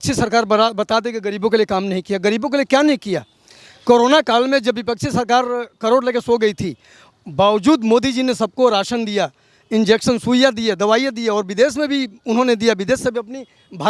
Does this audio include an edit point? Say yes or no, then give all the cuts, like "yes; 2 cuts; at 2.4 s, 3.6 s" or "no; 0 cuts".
no; 0 cuts